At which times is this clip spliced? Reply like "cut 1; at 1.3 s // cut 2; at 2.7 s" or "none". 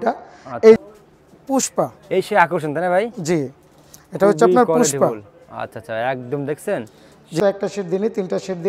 cut 1; at 0.8 s // cut 2; at 7.4 s